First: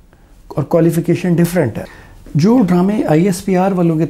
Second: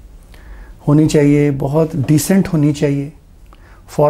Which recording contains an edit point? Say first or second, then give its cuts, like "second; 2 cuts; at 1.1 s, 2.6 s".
first; 1 cut; at 1.8 s